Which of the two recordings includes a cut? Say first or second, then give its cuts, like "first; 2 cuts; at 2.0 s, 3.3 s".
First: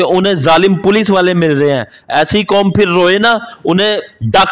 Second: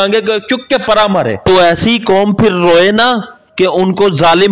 second; 1 cut; at 1.4 s